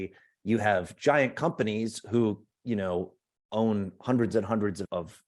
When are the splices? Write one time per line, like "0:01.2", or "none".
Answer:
none